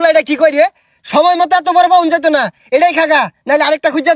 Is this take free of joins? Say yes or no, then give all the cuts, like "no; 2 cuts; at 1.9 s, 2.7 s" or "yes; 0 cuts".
yes; 0 cuts